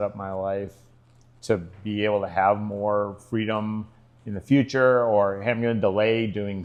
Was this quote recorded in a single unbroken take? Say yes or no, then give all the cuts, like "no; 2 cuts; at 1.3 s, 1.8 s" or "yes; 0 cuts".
yes; 0 cuts